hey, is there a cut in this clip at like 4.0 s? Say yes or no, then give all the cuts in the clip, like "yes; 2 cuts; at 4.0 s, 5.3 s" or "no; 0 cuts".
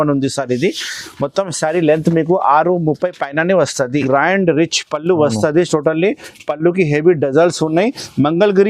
yes; 1 cut; at 4.0 s